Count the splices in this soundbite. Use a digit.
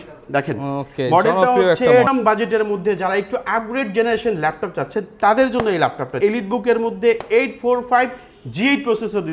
2